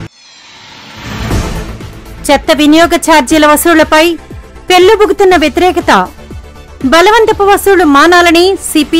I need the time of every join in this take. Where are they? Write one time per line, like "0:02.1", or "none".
0:01.5